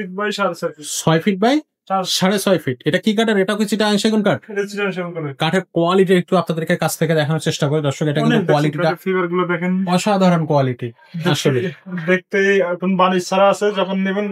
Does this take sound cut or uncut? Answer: uncut